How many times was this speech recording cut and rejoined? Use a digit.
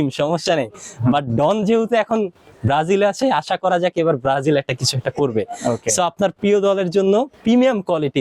0